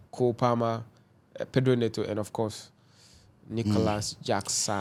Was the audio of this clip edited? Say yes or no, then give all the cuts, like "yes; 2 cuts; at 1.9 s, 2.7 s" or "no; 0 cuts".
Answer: no; 0 cuts